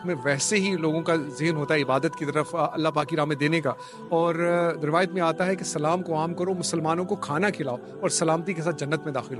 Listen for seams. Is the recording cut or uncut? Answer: uncut